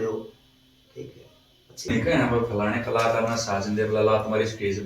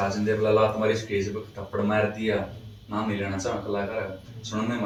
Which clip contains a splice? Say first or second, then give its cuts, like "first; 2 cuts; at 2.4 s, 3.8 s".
first; 1 cut; at 1.9 s